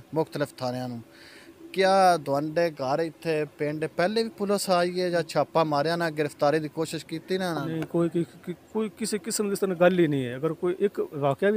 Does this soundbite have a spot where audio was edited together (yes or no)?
no